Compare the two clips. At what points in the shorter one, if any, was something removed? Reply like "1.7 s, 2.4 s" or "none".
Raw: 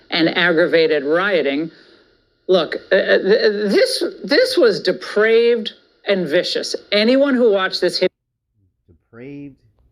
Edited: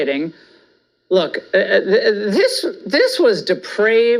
none